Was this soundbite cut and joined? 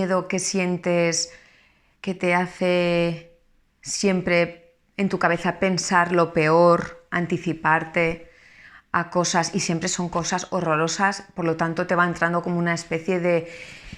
yes; 1 cut; at 6.7 s

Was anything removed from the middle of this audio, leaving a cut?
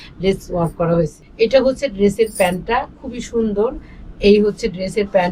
yes; 1 cut; at 1.2 s

